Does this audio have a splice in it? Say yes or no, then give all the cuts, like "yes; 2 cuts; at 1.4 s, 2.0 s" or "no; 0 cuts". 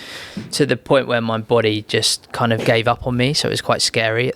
no; 0 cuts